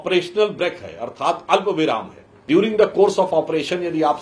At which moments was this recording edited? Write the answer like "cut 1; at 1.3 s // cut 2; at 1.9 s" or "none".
cut 1; at 2.4 s